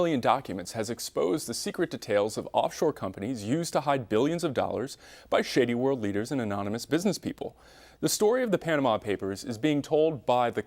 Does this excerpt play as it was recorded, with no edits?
yes; 0 cuts

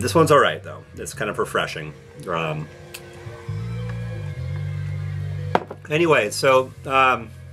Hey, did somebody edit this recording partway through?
no; 0 cuts

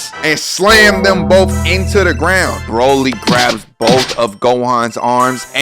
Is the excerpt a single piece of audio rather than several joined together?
no; 1 cut; at 2.6 s

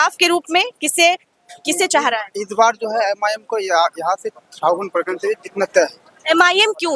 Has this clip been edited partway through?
no; 0 cuts

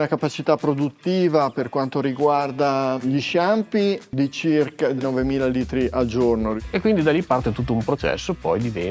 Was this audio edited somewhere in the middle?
yes; 2 cuts; at 4.1 s, 6.6 s

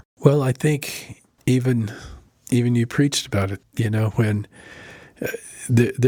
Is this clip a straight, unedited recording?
yes; 0 cuts

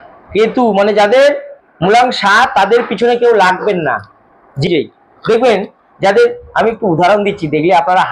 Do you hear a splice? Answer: yes; 1 cut; at 4.7 s

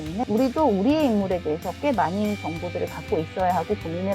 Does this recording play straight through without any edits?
yes; 0 cuts

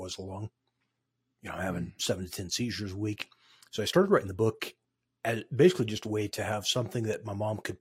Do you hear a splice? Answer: no; 0 cuts

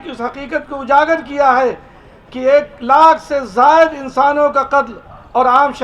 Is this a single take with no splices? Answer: yes; 0 cuts

